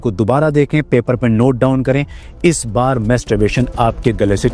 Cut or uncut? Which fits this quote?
uncut